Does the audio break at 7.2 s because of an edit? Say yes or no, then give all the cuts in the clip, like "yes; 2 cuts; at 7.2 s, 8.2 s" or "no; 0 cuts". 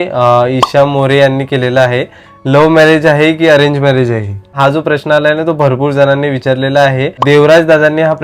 yes; 2 cuts; at 4.5 s, 7.2 s